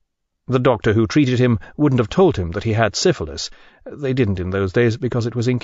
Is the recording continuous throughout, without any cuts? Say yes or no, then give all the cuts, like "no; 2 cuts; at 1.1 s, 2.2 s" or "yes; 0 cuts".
yes; 0 cuts